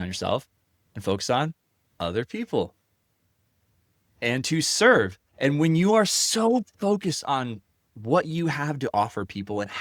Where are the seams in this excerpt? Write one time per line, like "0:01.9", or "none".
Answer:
none